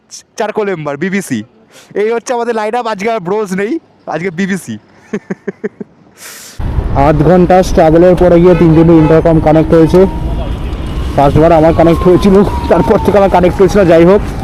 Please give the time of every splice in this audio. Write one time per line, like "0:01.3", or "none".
none

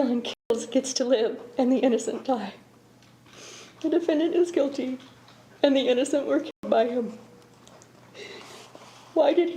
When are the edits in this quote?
none

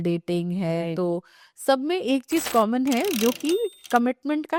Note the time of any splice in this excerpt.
none

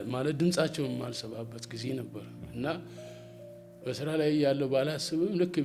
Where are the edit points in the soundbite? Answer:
none

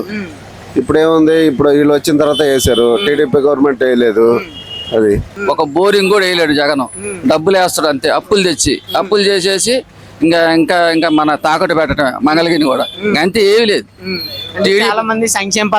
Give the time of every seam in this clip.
0:05.3

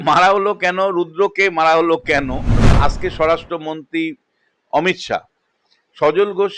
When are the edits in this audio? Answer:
0:02.6

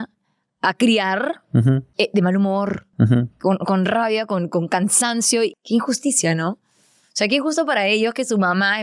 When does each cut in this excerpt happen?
0:01.9
0:05.5

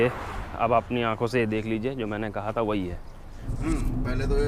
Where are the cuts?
0:03.5

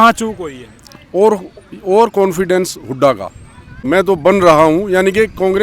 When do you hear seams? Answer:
0:03.7

